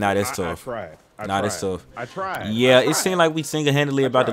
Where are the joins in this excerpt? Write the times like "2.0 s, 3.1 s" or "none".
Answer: none